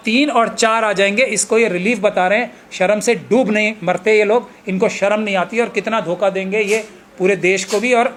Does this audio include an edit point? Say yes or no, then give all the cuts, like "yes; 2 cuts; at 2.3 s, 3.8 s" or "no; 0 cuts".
no; 0 cuts